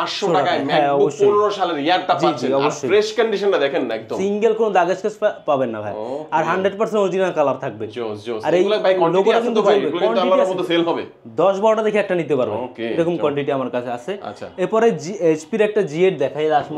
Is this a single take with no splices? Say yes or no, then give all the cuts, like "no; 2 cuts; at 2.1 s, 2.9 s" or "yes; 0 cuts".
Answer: yes; 0 cuts